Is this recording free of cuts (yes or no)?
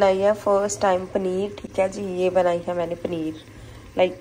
yes